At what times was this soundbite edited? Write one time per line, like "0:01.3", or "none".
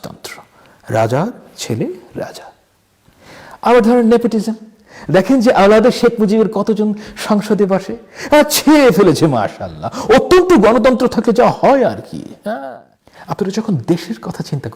0:12.6